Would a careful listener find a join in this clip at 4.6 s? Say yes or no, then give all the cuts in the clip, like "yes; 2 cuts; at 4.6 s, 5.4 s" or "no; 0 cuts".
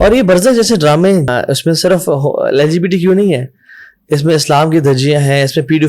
no; 1 cut; at 1.3 s